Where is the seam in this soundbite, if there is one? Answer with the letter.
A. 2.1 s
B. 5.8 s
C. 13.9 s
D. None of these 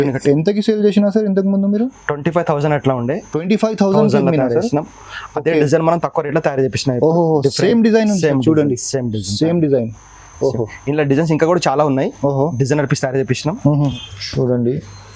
C